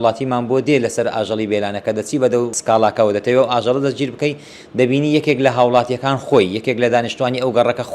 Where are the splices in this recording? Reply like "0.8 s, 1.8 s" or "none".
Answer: 2.6 s